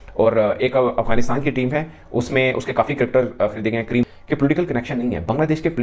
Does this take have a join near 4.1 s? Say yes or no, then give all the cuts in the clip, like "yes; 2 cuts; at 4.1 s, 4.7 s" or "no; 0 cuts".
yes; 1 cut; at 4.1 s